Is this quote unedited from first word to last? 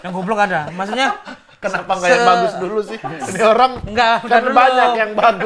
yes; 0 cuts

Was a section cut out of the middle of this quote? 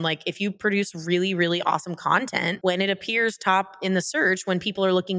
no; 0 cuts

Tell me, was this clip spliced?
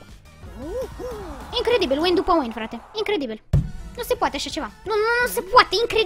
no; 0 cuts

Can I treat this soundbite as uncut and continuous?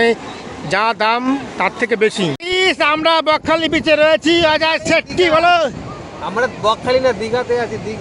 no; 1 cut; at 2.4 s

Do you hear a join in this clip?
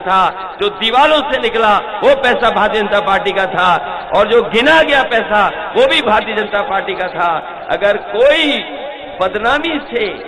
no; 0 cuts

